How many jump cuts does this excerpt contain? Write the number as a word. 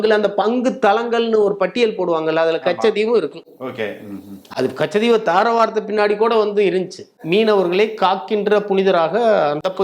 one